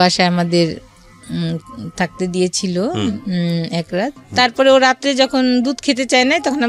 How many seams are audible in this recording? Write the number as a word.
one